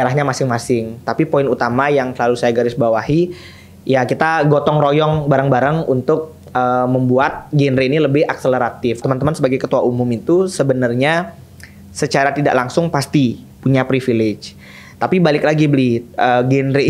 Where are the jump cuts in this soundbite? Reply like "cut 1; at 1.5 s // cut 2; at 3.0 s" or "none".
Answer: cut 1; at 9.0 s